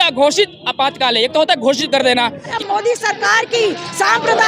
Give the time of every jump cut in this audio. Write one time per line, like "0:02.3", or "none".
0:02.5